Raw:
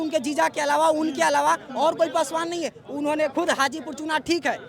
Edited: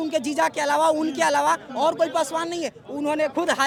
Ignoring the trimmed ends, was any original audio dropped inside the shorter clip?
no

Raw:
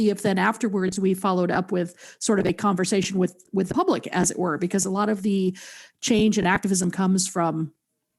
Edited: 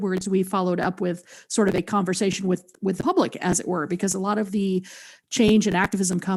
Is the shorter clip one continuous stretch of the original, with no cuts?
yes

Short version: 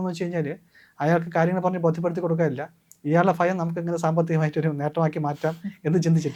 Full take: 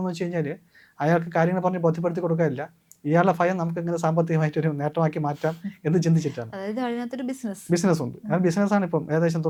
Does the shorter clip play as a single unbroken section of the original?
yes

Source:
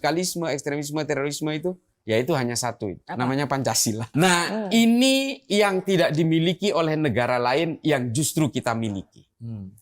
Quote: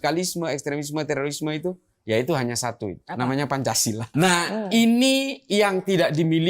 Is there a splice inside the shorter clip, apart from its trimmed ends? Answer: no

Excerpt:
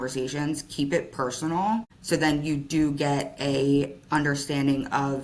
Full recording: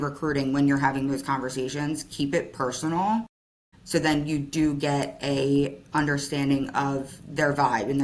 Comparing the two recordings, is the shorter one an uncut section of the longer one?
no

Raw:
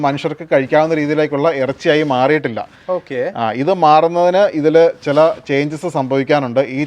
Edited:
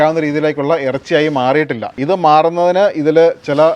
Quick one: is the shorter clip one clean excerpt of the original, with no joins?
no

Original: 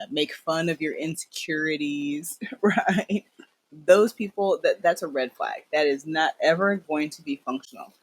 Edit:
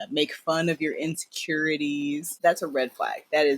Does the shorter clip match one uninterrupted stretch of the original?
no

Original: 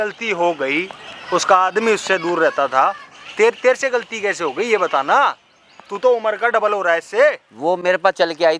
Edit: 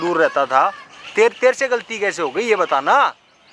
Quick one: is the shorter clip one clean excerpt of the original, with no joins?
yes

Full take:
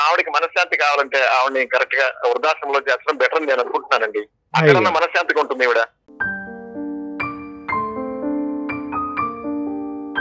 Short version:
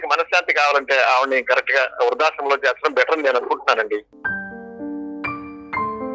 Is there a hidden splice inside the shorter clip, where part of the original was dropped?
yes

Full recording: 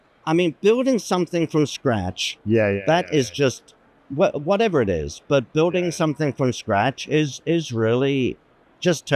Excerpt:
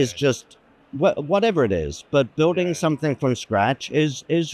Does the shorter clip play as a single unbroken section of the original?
yes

